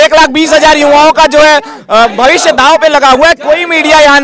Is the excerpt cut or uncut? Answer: uncut